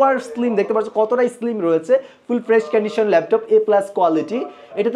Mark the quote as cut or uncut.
uncut